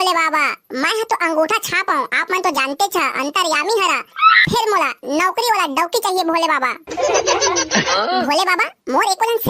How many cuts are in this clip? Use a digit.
1